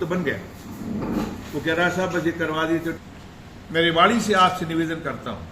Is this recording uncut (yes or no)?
no